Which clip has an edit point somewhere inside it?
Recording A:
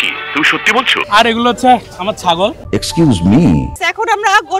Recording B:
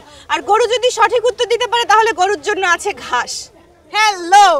A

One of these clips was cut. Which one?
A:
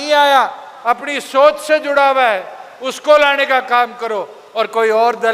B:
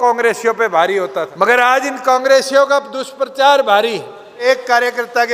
B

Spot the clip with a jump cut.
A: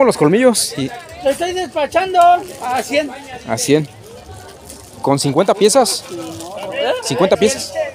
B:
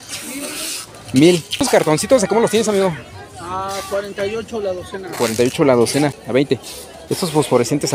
B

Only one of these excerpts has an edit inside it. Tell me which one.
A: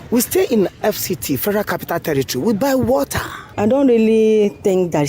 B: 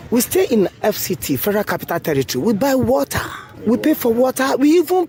A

